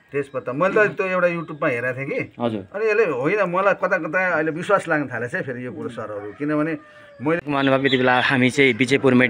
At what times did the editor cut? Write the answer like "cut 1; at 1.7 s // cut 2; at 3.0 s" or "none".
cut 1; at 7.4 s

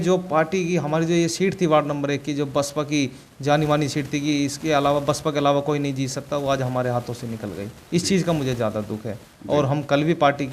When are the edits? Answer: cut 1; at 9.3 s

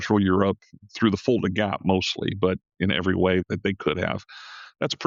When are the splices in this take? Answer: none

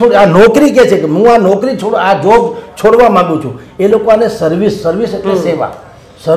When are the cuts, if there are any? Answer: none

